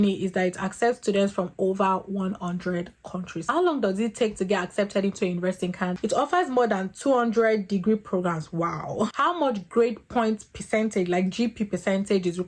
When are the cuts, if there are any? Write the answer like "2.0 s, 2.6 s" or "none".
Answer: 3.5 s, 6.0 s, 9.1 s